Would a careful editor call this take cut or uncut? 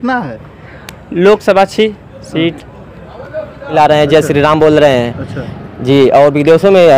cut